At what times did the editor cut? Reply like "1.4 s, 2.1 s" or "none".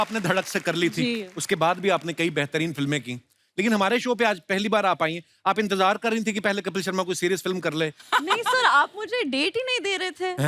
none

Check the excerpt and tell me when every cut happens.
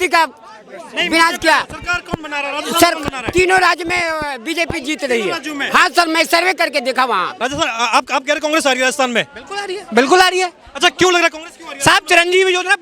7.3 s

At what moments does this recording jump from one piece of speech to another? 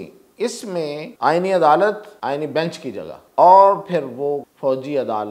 1.1 s, 2.1 s, 3.2 s, 4.5 s

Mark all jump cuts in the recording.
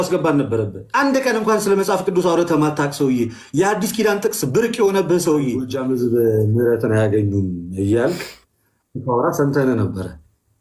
5.7 s

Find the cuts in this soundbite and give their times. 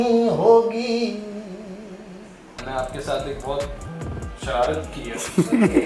2.6 s

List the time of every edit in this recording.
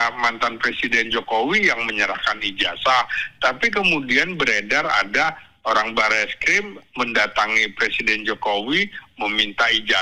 none

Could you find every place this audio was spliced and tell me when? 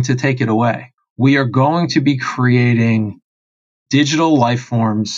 0.9 s, 3.7 s

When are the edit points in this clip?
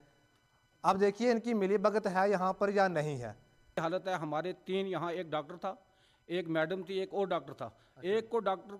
3.8 s

